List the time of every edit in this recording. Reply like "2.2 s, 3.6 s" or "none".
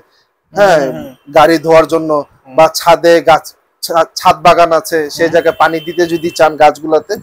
none